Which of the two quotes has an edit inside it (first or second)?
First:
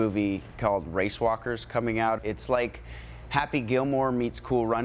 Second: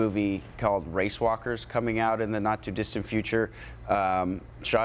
first